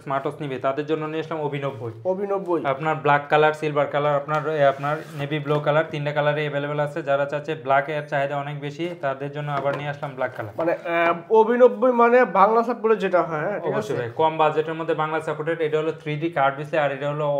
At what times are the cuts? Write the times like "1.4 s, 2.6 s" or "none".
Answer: none